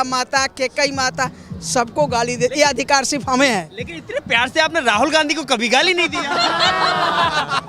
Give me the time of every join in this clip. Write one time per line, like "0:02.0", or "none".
none